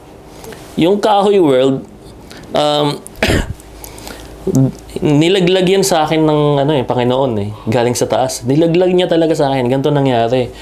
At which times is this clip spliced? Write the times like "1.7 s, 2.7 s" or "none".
none